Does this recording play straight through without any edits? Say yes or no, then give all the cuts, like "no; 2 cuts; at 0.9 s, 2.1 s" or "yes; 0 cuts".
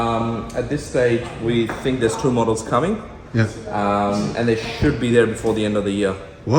yes; 0 cuts